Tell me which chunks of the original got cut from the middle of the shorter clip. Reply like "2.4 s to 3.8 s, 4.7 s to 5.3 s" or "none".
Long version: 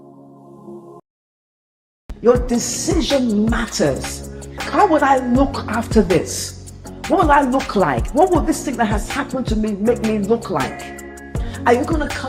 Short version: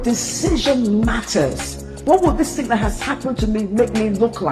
4.4 s to 8.0 s